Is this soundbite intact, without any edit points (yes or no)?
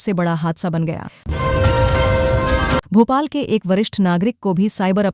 yes